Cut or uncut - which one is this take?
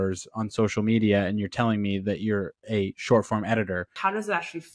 cut